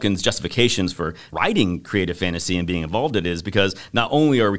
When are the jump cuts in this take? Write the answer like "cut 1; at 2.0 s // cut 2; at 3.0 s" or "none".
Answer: cut 1; at 1.2 s